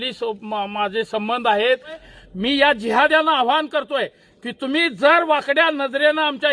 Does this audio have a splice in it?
yes; 1 cut; at 2.1 s

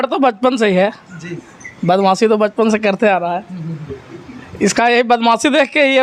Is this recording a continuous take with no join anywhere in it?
yes; 0 cuts

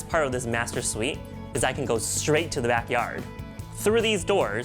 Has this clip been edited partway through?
no; 0 cuts

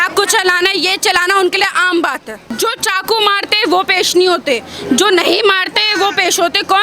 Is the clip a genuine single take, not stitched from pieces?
no; 1 cut; at 2.6 s

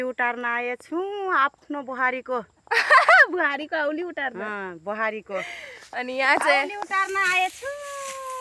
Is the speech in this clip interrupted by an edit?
no; 0 cuts

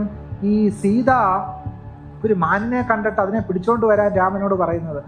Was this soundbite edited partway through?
no; 0 cuts

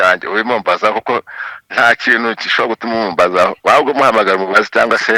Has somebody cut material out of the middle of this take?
no; 0 cuts

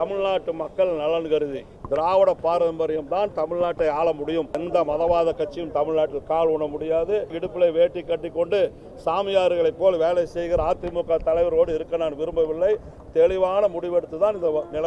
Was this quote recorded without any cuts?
no; 3 cuts; at 1.7 s, 4.6 s, 7.4 s

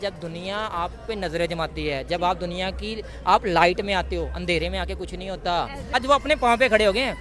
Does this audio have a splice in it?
yes; 1 cut; at 5.9 s

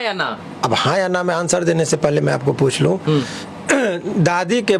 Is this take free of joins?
yes; 0 cuts

